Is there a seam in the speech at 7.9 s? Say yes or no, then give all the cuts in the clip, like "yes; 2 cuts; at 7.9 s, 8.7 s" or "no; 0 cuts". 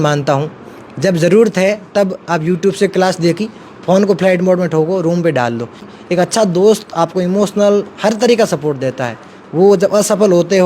no; 1 cut; at 5.9 s